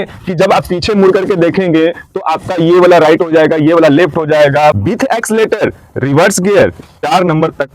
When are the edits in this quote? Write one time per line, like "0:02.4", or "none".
0:04.8